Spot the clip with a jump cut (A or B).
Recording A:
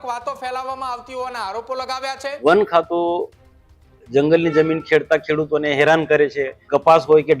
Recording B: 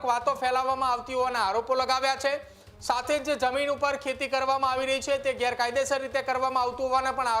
A